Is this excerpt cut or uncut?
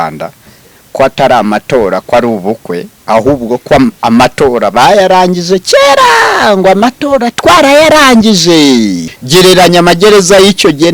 cut